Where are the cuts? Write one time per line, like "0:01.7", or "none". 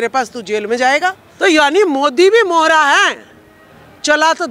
0:01.2

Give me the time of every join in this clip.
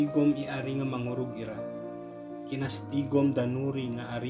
0:01.4
0:02.5

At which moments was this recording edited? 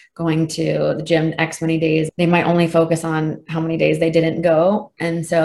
0:02.1

